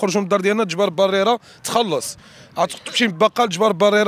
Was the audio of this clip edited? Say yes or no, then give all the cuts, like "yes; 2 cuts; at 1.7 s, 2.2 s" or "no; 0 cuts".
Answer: no; 0 cuts